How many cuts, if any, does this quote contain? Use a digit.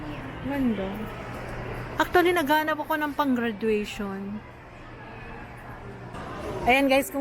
1